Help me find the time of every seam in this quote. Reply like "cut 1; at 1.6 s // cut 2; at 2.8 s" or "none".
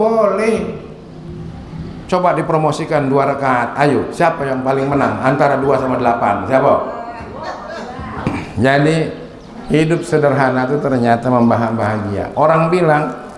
cut 1; at 8.2 s